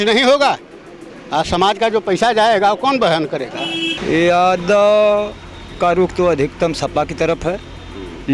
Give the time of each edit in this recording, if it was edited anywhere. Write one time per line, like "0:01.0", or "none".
0:03.9